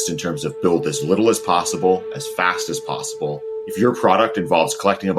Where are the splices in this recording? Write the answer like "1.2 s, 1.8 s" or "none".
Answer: 3.6 s